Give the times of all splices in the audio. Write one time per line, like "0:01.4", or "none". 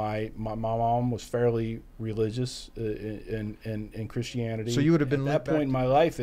0:05.2